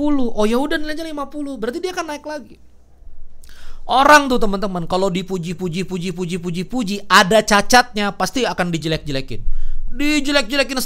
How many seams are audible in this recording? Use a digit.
0